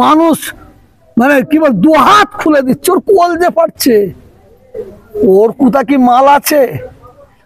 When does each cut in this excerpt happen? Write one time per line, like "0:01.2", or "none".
none

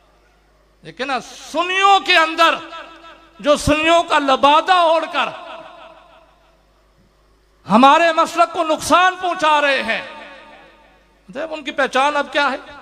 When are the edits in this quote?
none

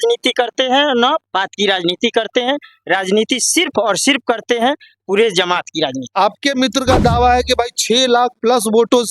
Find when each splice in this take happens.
0:06.0

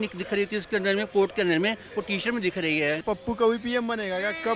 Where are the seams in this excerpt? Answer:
0:03.0

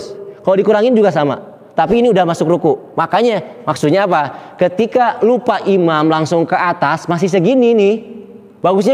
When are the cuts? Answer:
none

